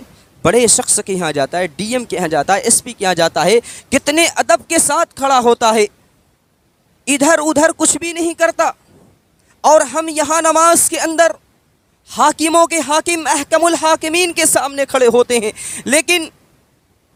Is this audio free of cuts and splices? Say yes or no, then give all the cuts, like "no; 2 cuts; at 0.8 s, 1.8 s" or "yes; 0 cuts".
yes; 0 cuts